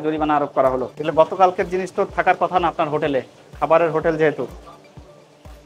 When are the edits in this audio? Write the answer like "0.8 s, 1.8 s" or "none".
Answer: 0.9 s